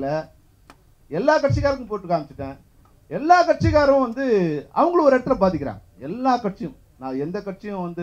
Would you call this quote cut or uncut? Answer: uncut